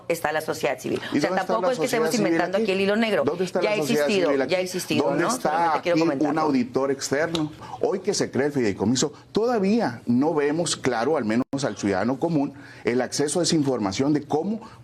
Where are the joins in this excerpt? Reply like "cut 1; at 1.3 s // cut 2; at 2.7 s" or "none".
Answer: cut 1; at 7.7 s